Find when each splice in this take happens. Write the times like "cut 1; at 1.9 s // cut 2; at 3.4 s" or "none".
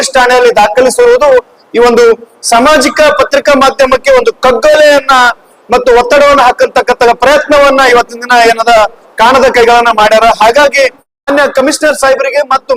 cut 1; at 11.1 s